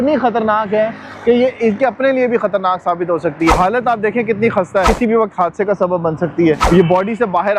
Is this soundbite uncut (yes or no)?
no